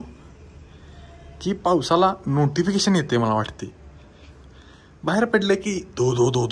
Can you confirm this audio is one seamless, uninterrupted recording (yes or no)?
yes